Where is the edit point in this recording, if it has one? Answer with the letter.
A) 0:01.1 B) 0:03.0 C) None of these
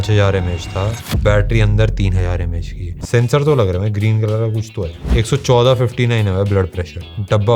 B